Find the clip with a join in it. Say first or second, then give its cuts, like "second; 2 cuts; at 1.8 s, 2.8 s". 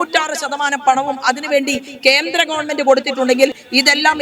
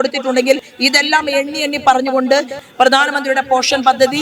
second; 1 cut; at 2.6 s